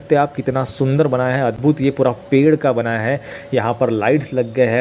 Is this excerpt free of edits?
yes; 0 cuts

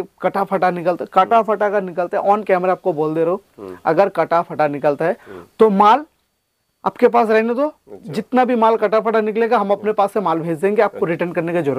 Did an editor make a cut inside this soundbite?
no; 0 cuts

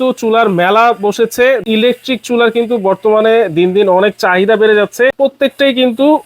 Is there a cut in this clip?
yes; 2 cuts; at 1.6 s, 5.2 s

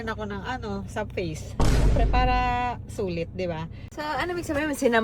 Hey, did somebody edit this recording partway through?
yes; 1 cut; at 3.9 s

